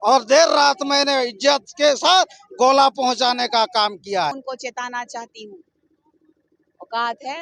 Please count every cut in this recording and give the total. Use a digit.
1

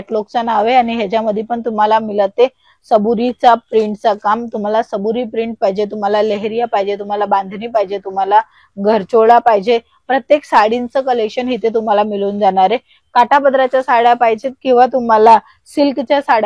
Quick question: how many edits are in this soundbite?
0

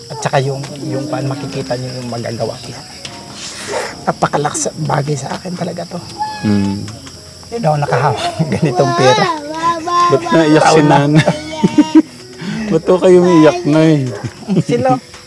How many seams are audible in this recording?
1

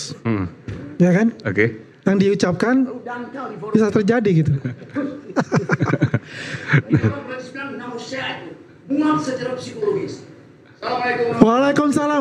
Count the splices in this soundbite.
0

